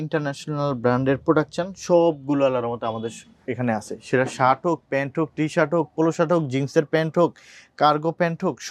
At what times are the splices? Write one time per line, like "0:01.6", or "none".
none